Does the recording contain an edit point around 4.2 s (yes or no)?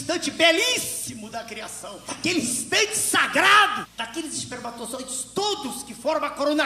no